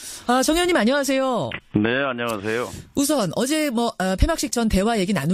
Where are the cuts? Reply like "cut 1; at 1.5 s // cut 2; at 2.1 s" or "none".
none